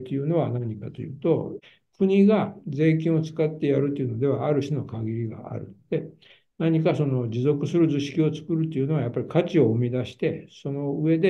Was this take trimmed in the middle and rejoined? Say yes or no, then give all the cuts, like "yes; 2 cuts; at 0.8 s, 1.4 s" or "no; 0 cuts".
yes; 1 cut; at 1.6 s